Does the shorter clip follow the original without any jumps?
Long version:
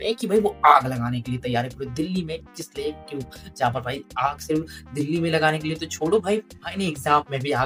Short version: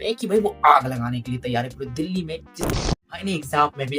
no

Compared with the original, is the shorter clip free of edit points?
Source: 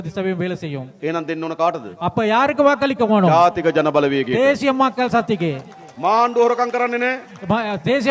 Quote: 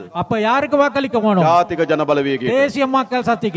yes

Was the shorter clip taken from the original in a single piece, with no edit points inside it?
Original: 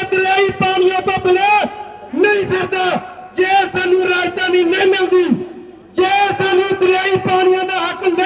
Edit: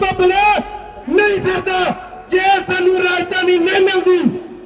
yes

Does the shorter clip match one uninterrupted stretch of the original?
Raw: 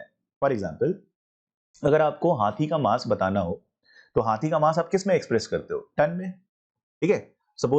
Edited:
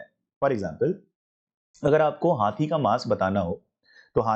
yes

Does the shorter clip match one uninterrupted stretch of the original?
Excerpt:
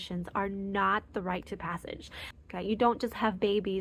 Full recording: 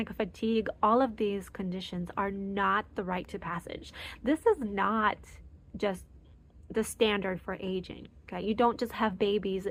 no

